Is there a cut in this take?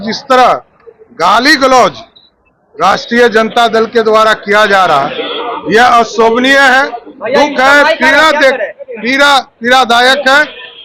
no; 0 cuts

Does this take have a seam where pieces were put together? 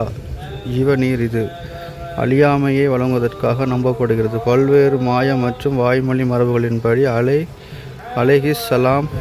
no; 0 cuts

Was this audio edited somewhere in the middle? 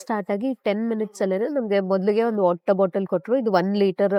no; 0 cuts

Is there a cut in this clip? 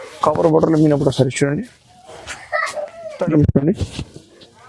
yes; 1 cut; at 3.2 s

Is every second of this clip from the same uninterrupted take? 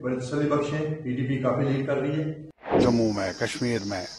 no; 1 cut; at 2.7 s

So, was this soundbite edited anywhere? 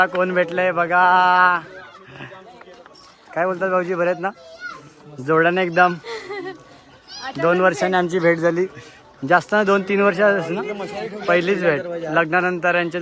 no; 0 cuts

